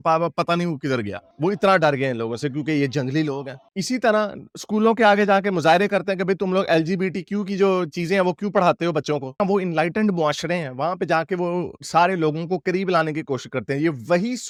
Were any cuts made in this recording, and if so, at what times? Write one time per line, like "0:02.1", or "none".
none

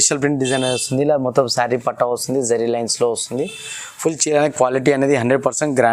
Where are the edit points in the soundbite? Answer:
none

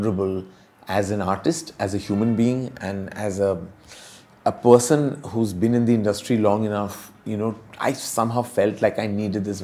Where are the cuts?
none

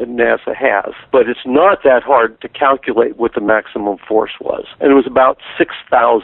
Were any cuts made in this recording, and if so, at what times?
0:04.7

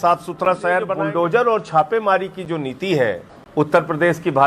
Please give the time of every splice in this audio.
0:01.0
0:03.3

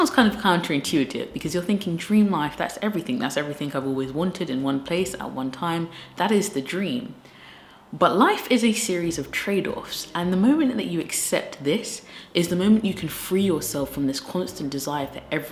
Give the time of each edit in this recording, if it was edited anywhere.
none

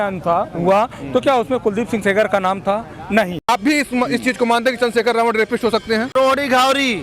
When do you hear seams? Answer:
0:03.5
0:06.1

